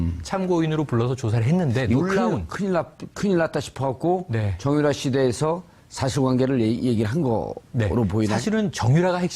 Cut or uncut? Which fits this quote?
cut